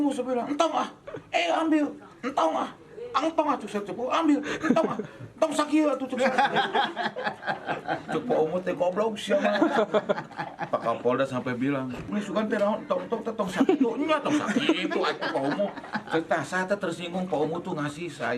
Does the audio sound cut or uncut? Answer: cut